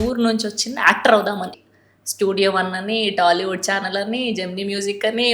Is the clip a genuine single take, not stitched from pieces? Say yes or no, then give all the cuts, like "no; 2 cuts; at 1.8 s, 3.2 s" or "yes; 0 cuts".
no; 1 cut; at 1.6 s